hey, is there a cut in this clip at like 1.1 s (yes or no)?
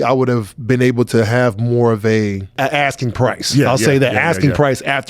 no